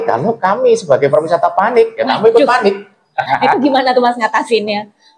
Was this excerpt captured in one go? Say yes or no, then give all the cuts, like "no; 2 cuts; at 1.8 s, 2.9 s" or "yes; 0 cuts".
no; 1 cut; at 3.2 s